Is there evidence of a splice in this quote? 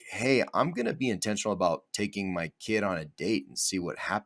no; 0 cuts

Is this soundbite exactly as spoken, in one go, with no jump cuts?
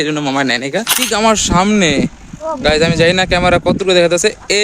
no; 1 cut; at 1.1 s

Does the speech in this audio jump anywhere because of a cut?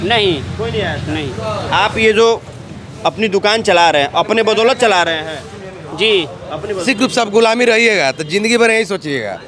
yes; 1 cut; at 6.8 s

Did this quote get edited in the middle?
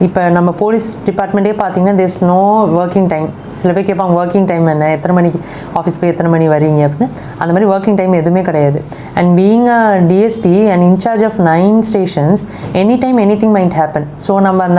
no; 0 cuts

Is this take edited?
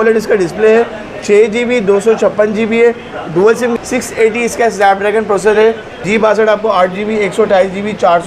yes; 2 cuts; at 3.7 s, 5.9 s

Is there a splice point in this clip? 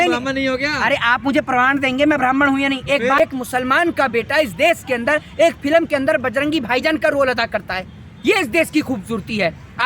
yes; 1 cut; at 3.2 s

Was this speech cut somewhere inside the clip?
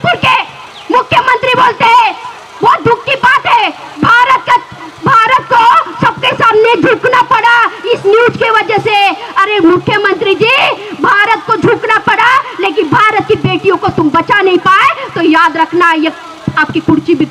no; 0 cuts

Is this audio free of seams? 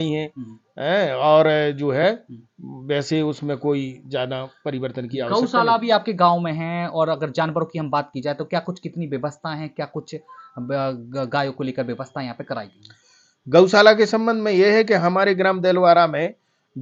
yes; 0 cuts

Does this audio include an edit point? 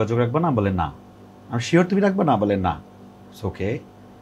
no; 0 cuts

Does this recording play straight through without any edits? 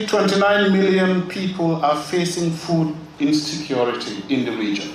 yes; 0 cuts

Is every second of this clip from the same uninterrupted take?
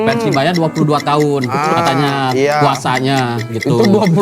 yes; 0 cuts

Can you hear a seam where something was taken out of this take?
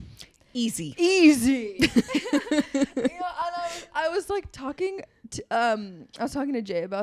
no; 0 cuts

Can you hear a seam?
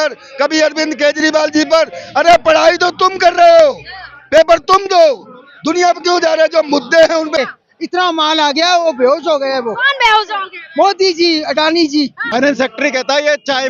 yes; 2 cuts; at 7.4 s, 12.2 s

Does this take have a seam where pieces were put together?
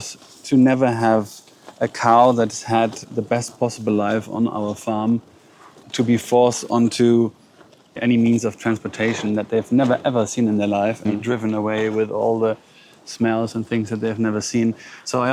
no; 0 cuts

